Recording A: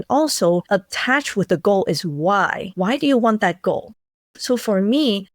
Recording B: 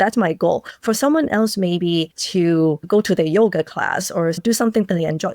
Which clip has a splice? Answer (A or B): B